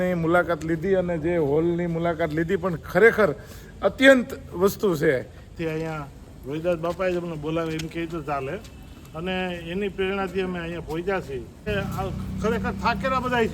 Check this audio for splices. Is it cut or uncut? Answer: cut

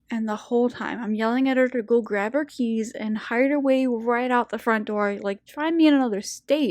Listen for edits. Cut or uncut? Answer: cut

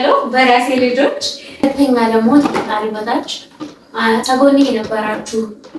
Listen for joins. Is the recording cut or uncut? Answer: cut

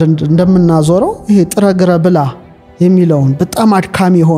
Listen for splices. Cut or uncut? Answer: uncut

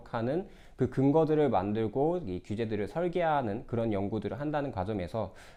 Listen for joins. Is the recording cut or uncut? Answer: uncut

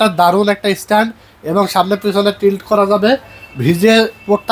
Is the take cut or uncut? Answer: uncut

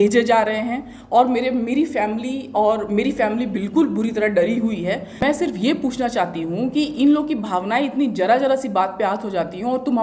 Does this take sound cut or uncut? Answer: cut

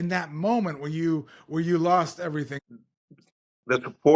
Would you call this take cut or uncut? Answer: cut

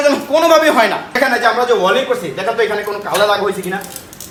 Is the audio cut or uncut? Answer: uncut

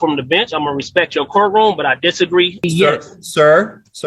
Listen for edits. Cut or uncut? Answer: cut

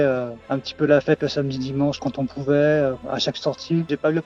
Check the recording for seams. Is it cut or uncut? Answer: cut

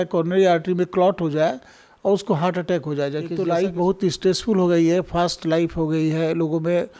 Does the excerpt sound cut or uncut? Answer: cut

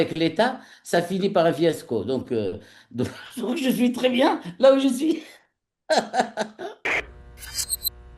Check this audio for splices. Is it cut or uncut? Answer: cut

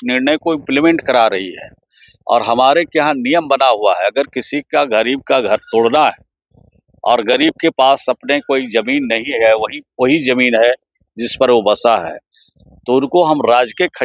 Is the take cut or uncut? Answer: uncut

